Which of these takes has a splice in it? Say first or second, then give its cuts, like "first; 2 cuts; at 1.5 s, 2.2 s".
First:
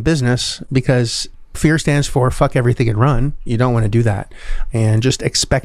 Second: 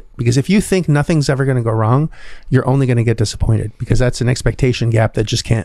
first; 3 cuts; at 1.6 s, 3.4 s, 4.6 s